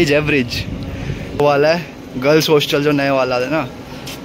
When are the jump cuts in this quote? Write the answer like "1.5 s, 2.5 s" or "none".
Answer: 1.4 s